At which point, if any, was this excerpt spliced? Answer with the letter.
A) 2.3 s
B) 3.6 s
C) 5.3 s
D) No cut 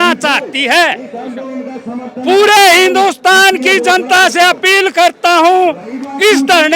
D